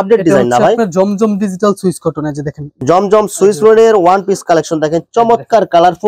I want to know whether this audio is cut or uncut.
cut